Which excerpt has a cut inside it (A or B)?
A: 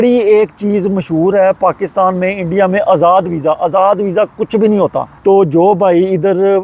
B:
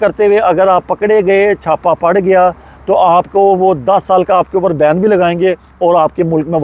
A